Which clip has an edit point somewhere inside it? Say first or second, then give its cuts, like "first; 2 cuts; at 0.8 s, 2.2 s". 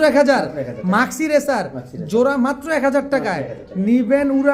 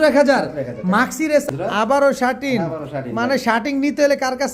second; 1 cut; at 1.5 s